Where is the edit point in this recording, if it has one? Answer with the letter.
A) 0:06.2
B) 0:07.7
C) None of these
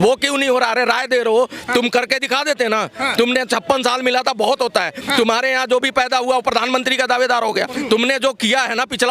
B